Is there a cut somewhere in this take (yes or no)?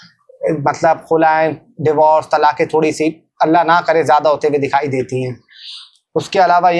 no